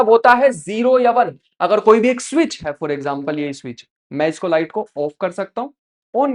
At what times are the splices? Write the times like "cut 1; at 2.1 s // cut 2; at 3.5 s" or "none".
none